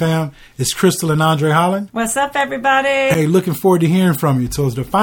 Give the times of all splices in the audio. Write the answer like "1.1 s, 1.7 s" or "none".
none